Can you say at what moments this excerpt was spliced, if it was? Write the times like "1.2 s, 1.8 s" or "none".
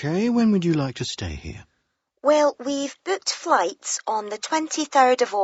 none